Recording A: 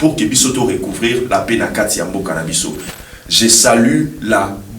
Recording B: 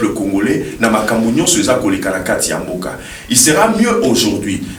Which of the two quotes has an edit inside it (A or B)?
A